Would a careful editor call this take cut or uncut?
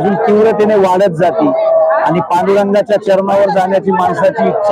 uncut